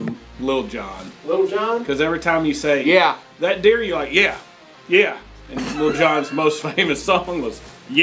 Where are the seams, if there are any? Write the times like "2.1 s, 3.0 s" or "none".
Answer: none